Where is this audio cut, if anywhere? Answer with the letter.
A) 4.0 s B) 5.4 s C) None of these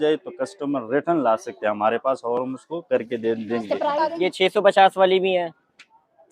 A